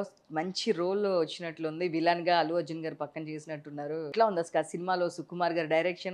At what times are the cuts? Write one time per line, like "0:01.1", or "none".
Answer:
0:04.1